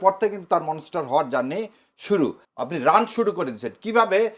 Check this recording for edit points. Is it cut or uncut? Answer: cut